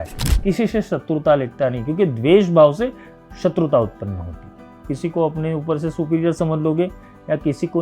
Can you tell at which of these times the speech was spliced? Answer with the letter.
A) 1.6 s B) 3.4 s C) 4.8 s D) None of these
C